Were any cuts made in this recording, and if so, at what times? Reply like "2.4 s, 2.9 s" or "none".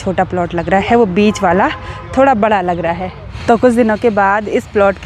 3.3 s